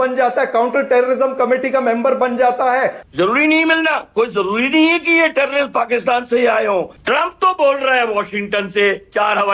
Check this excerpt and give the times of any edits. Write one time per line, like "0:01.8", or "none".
0:03.0
0:07.0